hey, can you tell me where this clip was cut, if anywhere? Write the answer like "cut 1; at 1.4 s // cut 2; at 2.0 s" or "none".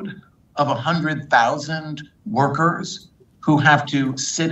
none